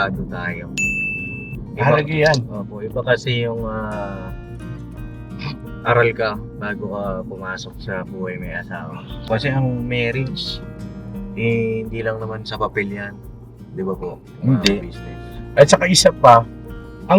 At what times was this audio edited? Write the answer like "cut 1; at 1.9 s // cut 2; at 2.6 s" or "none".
cut 1; at 9.2 s